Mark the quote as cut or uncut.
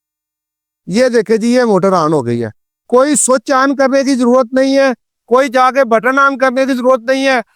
uncut